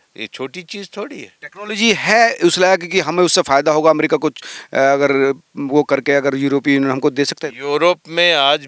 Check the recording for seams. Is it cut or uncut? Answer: uncut